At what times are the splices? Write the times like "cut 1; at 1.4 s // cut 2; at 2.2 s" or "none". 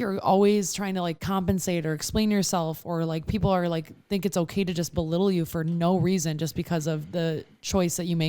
cut 1; at 1.2 s